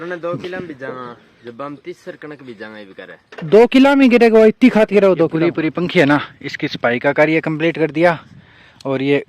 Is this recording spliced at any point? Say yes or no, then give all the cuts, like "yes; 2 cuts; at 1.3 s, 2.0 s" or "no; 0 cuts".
yes; 1 cut; at 5.3 s